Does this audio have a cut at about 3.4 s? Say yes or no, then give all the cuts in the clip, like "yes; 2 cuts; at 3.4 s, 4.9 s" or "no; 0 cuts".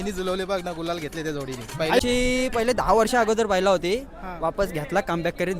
no; 1 cut; at 2.0 s